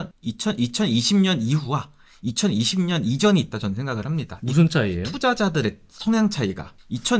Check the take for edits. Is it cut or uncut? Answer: uncut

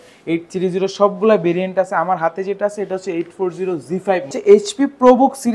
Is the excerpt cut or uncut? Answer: cut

